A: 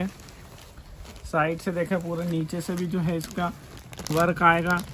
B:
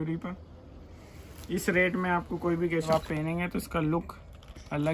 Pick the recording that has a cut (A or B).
B